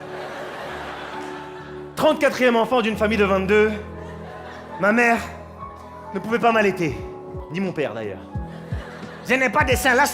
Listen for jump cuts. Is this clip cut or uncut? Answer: cut